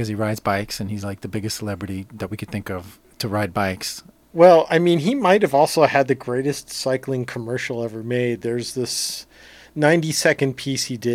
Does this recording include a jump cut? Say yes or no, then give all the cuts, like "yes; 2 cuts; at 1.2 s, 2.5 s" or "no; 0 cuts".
no; 0 cuts